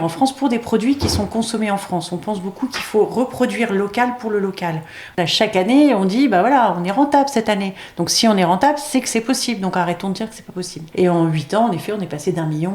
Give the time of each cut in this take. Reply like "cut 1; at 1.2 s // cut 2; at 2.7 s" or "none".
cut 1; at 5.0 s // cut 2; at 10.8 s